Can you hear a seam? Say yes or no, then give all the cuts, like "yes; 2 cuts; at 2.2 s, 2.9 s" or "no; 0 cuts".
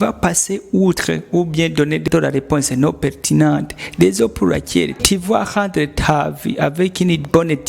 yes; 2 cuts; at 2.0 s, 5.0 s